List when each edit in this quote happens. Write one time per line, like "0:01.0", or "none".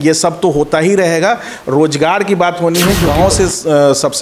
0:03.1